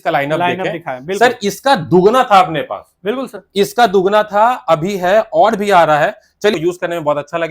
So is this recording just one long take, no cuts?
no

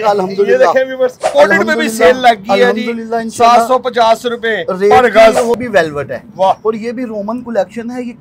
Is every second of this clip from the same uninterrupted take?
no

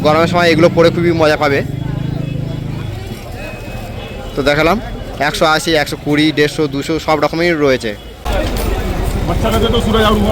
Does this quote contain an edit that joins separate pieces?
no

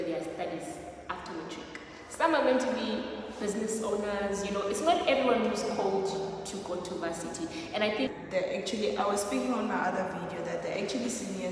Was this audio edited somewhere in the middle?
yes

